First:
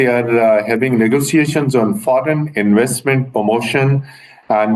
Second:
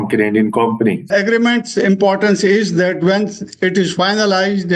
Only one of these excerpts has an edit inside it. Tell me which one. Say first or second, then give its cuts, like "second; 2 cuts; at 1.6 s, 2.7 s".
second; 1 cut; at 1.1 s